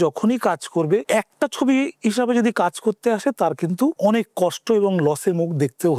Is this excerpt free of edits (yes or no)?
no